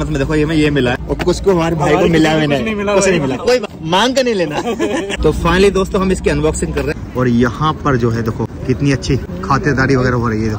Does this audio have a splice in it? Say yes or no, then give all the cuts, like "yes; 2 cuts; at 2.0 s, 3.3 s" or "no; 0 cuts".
yes; 6 cuts; at 1.0 s, 3.7 s, 5.1 s, 6.9 s, 8.6 s, 9.3 s